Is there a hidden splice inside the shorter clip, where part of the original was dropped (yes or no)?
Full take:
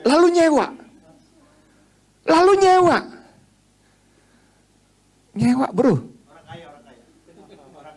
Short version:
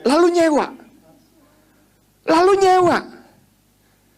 no